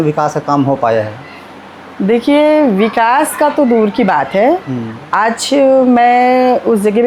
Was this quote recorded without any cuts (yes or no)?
yes